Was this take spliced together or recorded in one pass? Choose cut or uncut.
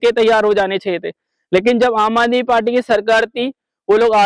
uncut